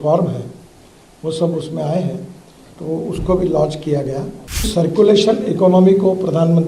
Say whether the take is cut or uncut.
cut